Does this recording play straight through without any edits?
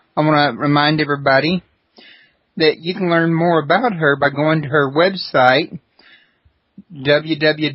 no; 1 cut; at 1.9 s

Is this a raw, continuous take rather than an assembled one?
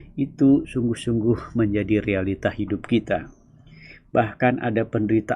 yes; 0 cuts

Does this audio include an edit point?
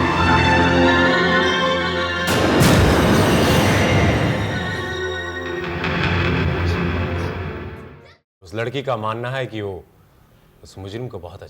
yes; 1 cut; at 7.8 s

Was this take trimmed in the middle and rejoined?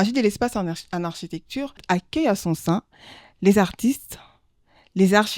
yes; 1 cut; at 1.8 s

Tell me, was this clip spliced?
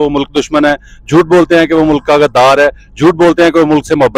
no; 0 cuts

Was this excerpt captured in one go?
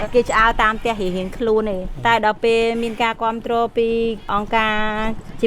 no; 2 cuts; at 1.9 s, 4.3 s

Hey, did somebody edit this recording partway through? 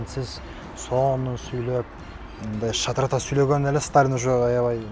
no; 0 cuts

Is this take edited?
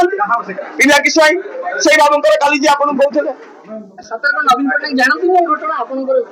no; 0 cuts

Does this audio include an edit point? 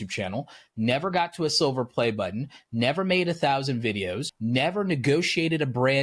yes; 1 cut; at 4.3 s

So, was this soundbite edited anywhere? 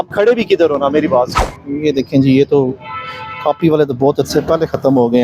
yes; 1 cut; at 1.4 s

